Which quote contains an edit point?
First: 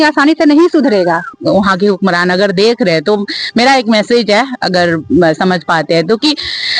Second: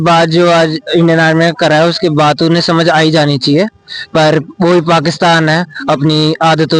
first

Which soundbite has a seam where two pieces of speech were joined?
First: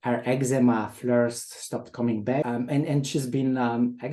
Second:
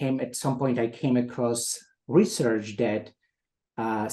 first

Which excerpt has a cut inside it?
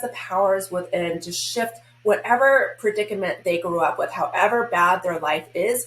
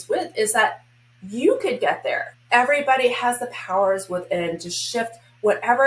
second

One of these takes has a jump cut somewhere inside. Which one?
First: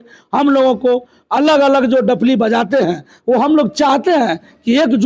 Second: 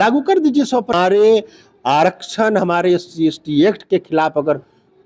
second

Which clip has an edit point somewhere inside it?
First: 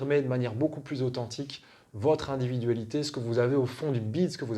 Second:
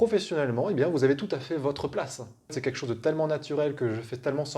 second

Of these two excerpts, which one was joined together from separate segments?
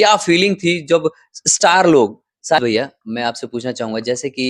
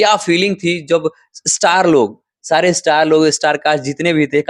first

